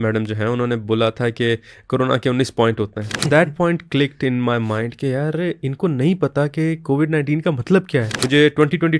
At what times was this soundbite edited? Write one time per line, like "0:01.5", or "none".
0:03.3
0:08.1